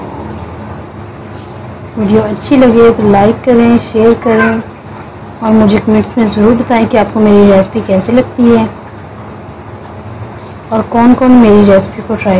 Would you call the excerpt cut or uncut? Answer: uncut